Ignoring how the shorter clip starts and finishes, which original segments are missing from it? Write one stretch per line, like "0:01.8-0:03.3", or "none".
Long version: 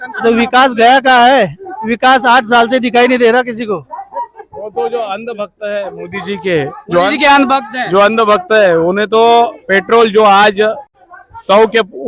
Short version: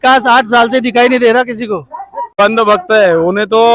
0:04.4-0:08.0